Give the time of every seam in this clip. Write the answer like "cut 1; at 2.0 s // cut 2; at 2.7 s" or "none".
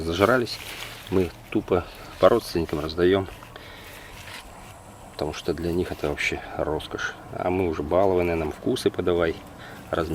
none